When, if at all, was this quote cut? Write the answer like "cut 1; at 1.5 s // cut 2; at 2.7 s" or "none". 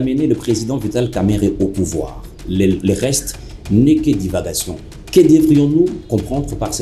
none

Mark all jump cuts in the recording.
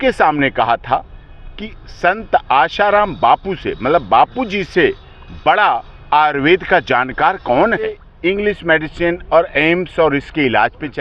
cut 1; at 8.1 s

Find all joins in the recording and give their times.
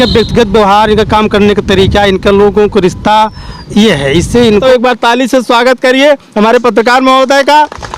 cut 1; at 4.5 s

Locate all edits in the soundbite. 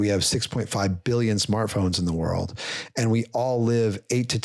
none

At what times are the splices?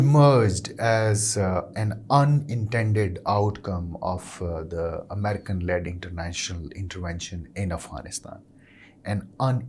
none

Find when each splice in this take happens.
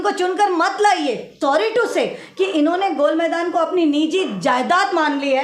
cut 1; at 1.3 s

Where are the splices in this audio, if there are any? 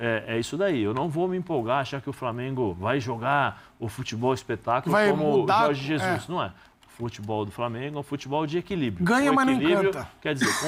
none

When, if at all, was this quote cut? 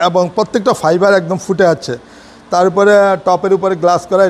none

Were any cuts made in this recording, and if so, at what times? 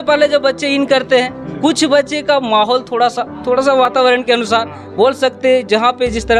none

